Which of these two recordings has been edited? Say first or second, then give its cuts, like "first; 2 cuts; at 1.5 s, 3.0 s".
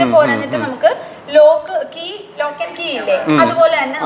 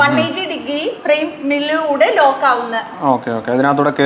second; 1 cut; at 1.0 s